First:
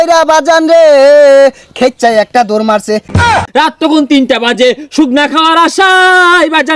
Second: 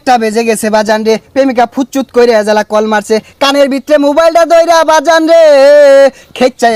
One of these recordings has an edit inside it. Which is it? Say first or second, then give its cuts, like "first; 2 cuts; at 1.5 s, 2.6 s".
first; 1 cut; at 3.3 s